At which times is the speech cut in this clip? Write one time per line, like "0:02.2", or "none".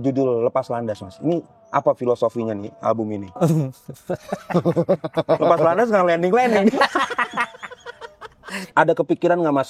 0:08.5